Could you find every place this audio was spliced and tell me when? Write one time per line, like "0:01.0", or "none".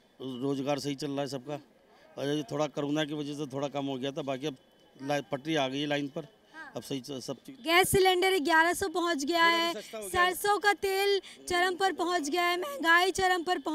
none